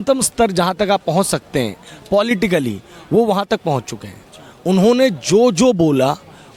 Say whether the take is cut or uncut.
uncut